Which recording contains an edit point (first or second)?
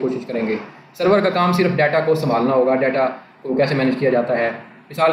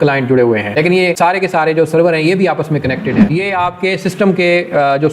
second